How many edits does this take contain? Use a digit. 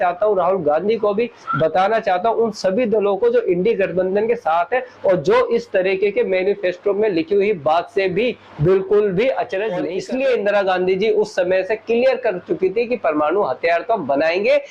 1